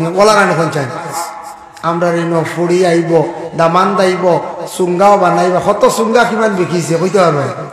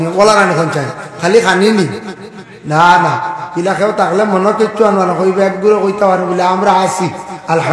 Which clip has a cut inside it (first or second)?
first